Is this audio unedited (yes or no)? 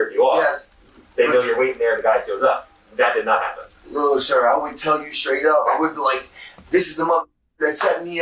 yes